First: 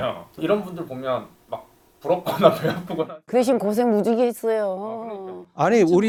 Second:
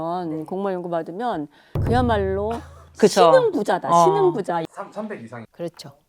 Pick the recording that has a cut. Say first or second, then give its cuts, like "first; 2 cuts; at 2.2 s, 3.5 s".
second; 1 cut; at 4.6 s